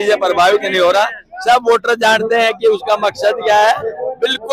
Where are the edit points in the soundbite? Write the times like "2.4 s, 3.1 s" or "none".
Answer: none